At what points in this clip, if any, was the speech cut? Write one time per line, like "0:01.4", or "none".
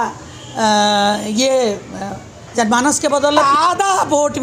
0:03.4